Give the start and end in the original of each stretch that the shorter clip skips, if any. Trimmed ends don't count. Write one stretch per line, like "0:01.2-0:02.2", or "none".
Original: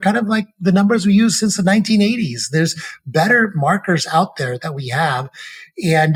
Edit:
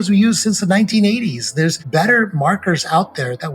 0:02.8-0:03.0